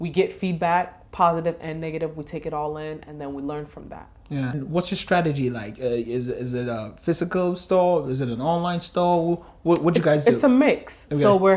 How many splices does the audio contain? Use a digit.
0